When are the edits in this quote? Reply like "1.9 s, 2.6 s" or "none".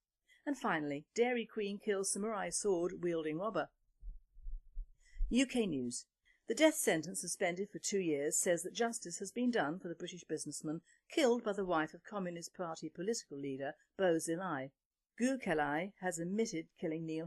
1.1 s